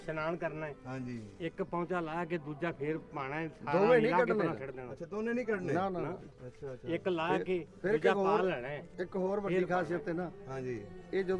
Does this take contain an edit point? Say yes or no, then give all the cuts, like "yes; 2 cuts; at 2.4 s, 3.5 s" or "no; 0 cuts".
no; 0 cuts